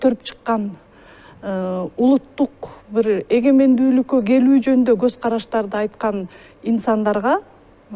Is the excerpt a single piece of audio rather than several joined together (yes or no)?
yes